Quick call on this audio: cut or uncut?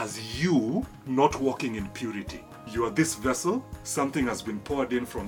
cut